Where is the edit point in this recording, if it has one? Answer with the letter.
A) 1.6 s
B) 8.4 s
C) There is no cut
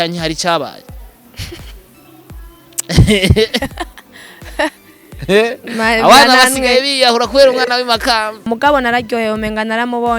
B